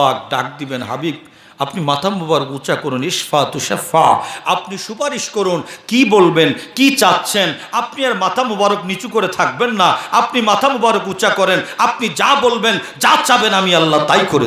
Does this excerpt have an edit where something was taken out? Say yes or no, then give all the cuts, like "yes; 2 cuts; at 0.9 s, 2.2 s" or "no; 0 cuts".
no; 0 cuts